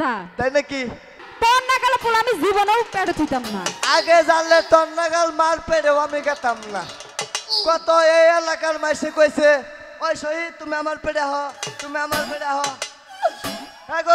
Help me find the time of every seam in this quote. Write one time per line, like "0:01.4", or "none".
0:01.2